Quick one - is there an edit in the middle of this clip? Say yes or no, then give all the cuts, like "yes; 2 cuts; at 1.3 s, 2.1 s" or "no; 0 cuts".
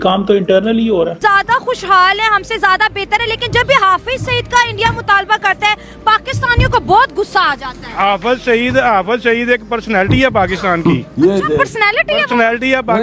yes; 1 cut; at 1.2 s